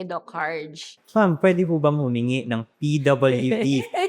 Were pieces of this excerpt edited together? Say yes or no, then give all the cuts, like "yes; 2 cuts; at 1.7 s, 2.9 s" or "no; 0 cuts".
yes; 1 cut; at 1.0 s